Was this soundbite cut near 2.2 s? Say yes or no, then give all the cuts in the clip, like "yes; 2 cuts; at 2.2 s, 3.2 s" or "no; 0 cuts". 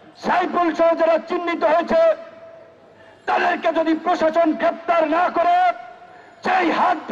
no; 0 cuts